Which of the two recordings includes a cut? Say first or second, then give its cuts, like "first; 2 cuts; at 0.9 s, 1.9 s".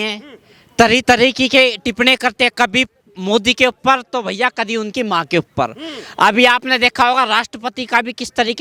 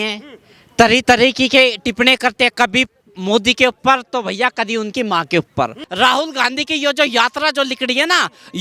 second; 1 cut; at 5.8 s